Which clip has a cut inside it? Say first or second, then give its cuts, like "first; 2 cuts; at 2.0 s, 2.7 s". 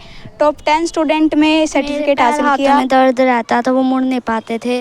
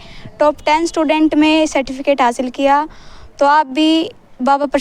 first; 1 cut; at 2.8 s